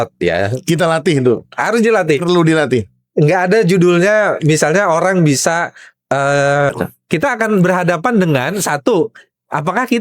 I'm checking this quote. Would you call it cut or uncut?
cut